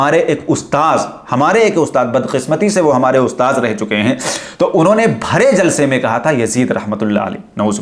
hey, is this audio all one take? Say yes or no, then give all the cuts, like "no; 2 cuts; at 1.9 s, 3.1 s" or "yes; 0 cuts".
yes; 0 cuts